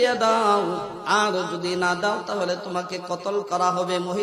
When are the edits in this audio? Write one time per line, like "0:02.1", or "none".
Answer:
0:00.9

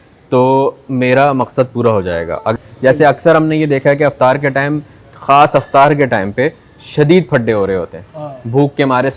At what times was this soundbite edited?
0:02.5

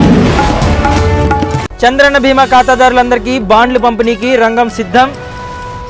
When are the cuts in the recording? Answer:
0:01.6

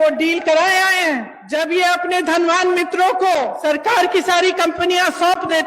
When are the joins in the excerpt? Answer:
0:01.4
0:03.6

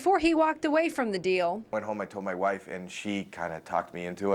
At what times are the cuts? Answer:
none

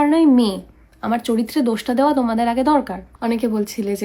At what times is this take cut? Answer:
0:03.0

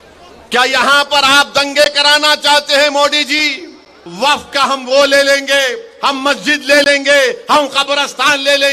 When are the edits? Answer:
0:04.0

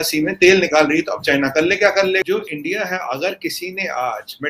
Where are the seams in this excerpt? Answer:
0:02.2

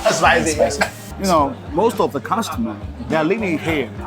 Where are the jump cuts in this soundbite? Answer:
0:01.0

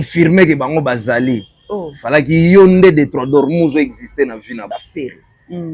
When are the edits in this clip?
0:04.7

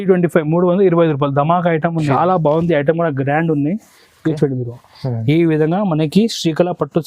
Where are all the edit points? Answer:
0:02.1

